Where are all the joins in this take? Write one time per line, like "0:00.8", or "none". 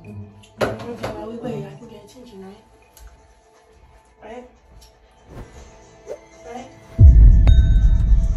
0:03.1